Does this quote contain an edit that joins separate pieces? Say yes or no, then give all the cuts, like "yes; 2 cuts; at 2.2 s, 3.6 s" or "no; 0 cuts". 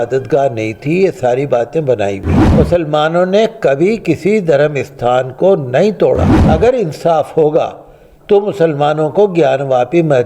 yes; 2 cuts; at 2.4 s, 6.3 s